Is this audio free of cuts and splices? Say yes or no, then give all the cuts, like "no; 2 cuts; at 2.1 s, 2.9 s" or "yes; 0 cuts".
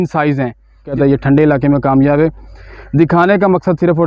no; 1 cut; at 0.9 s